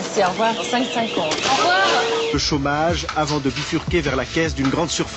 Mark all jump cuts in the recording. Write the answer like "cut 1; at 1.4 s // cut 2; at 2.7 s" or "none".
none